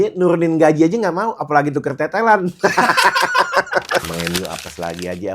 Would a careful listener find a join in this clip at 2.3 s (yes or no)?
no